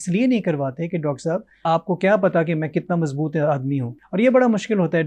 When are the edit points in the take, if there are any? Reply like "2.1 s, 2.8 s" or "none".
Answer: 1.6 s, 4.0 s